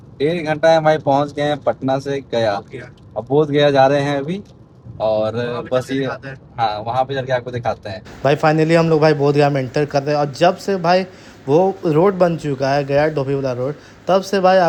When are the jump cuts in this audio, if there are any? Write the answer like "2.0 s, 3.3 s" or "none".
none